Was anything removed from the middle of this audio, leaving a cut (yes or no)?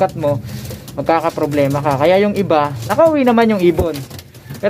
yes